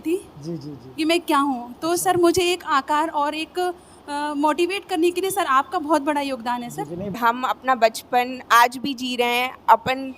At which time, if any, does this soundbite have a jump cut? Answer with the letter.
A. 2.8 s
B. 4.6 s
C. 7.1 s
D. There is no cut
C